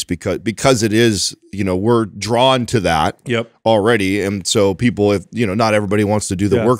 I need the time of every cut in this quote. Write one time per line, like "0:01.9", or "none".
none